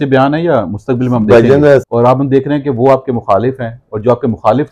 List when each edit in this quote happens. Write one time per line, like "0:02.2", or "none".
0:01.9